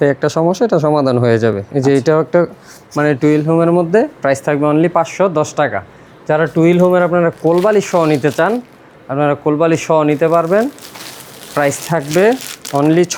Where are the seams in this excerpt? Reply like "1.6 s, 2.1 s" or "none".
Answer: none